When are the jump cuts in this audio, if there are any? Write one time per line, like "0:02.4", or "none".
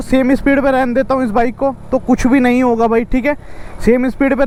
none